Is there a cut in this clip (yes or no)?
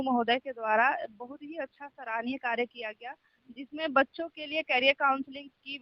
no